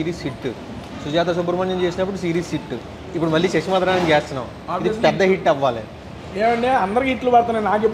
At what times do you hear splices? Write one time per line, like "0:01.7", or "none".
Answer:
none